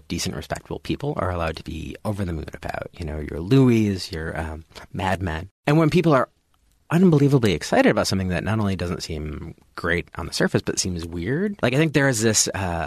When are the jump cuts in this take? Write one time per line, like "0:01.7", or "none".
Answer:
0:05.5
0:11.6